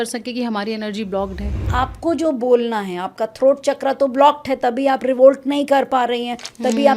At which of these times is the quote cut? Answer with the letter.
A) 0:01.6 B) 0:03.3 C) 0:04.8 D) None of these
A